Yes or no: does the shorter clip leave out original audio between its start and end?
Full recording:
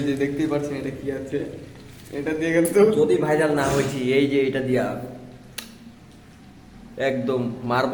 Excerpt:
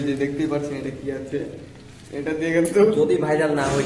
no